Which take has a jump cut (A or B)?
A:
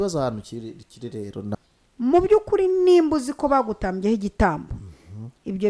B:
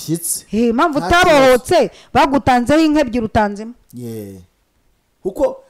A